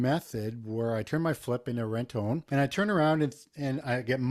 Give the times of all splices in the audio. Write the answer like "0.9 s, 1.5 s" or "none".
2.4 s